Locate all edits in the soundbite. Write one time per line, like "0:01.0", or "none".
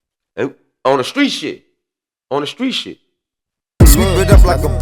0:03.8

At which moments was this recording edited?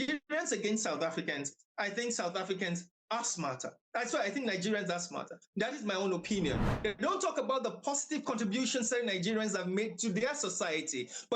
0:06.7

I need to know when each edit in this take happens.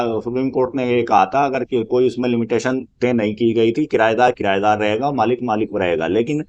none

